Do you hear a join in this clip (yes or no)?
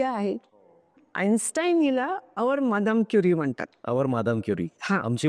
yes